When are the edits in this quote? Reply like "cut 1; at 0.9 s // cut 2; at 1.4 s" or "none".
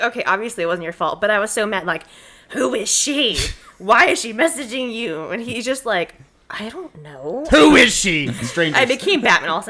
cut 1; at 7.4 s // cut 2; at 8.4 s

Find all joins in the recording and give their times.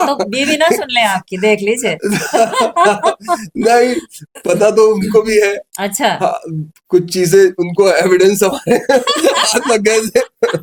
none

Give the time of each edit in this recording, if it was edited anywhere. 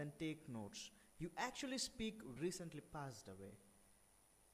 none

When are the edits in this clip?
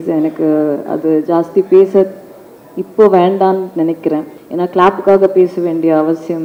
cut 1; at 4.4 s

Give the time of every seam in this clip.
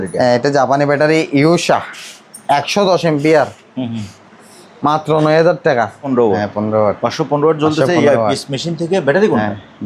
cut 1; at 6.0 s

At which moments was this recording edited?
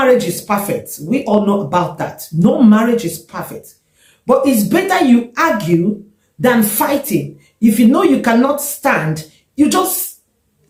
none

